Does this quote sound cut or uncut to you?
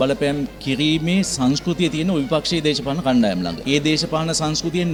uncut